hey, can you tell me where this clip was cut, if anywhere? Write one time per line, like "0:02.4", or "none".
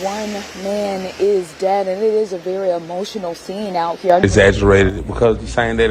0:04.2